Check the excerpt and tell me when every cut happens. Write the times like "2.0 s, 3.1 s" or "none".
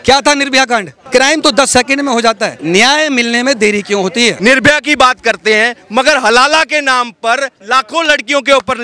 1.0 s, 2.5 s, 4.4 s